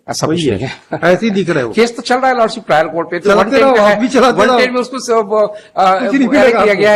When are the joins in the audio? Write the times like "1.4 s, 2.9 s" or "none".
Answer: none